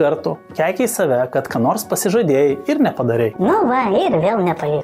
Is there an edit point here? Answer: no; 0 cuts

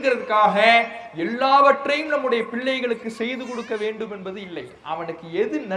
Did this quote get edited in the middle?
no; 0 cuts

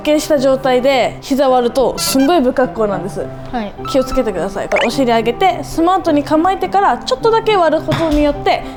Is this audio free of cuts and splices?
yes; 0 cuts

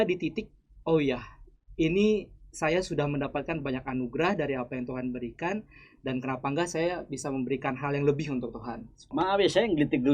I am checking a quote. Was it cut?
yes; 1 cut; at 9.1 s

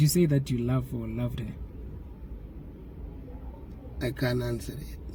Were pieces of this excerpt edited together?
no; 0 cuts

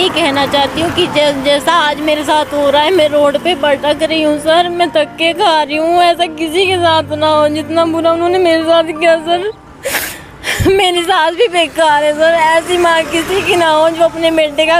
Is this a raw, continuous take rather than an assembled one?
yes; 0 cuts

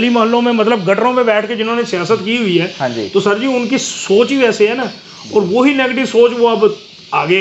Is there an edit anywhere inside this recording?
no; 0 cuts

